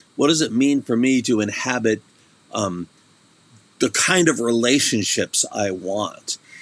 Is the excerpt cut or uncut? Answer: uncut